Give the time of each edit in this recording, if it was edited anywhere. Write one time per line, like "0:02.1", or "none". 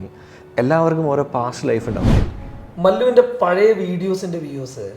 0:02.1